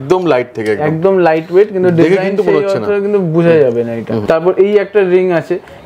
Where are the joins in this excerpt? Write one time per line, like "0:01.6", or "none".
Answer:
0:04.2